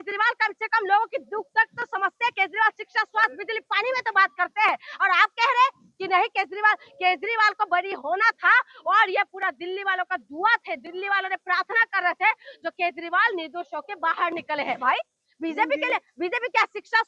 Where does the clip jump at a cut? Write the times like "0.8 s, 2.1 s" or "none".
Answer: 14.8 s